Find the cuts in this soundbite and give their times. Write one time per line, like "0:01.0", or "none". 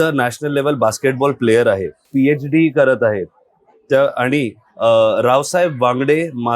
0:02.0